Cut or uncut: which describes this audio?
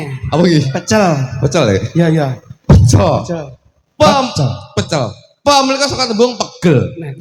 uncut